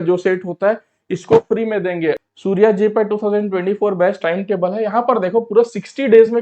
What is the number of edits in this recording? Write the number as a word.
one